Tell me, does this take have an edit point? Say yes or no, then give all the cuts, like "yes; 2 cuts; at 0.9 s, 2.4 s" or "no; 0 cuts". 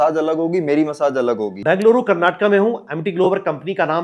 yes; 1 cut; at 1.6 s